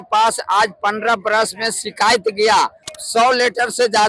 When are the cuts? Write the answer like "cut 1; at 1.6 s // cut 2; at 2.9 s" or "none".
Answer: cut 1; at 2.9 s